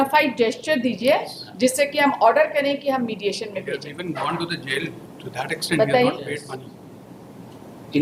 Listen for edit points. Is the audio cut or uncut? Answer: uncut